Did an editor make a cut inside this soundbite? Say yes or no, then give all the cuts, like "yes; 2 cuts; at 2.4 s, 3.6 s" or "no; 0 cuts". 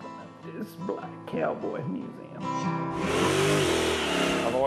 yes; 1 cut; at 3.1 s